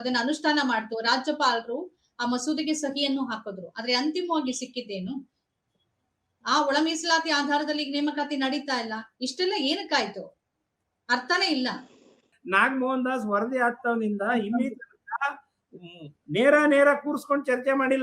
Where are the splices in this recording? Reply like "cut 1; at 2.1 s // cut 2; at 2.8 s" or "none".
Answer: cut 1; at 12.1 s